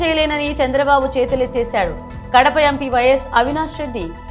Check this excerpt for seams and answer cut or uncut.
uncut